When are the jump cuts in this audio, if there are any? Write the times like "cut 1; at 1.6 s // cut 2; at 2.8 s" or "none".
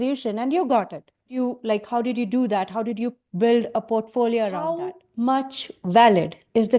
cut 1; at 1.4 s // cut 2; at 5.0 s